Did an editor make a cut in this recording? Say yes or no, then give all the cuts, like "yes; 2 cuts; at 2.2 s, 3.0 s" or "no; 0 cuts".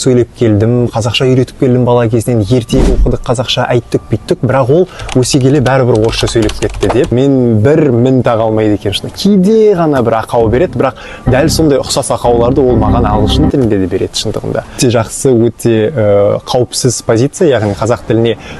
yes; 2 cuts; at 7.1 s, 14.8 s